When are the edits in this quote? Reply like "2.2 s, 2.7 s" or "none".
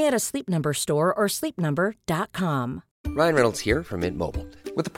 2.9 s